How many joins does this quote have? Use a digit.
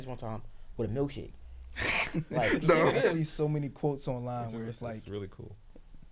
1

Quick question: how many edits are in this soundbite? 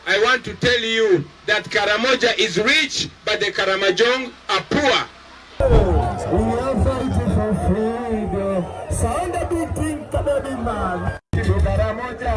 1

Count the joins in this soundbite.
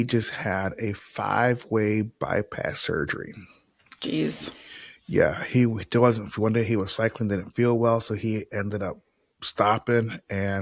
0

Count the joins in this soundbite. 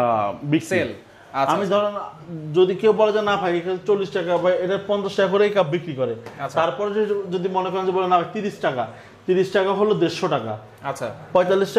0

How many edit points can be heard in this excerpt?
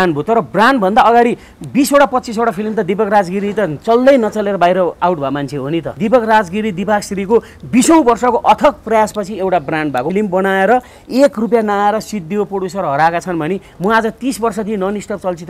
2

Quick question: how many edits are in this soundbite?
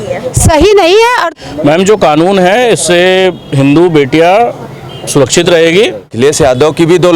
2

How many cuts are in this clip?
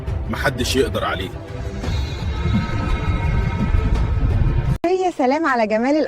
1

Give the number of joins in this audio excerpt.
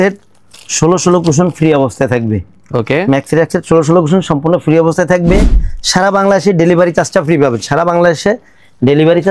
0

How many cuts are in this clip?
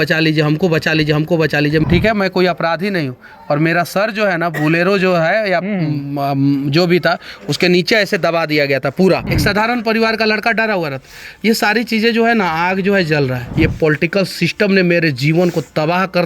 3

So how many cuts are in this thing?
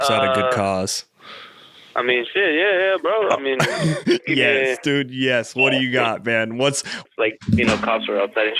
1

